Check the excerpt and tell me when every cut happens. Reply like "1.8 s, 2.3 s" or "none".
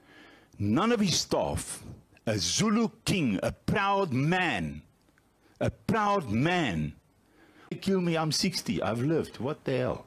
7.7 s